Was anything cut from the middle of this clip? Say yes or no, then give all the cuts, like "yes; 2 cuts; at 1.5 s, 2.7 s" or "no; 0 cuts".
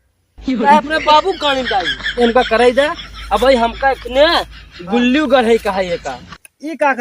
yes; 1 cut; at 2.1 s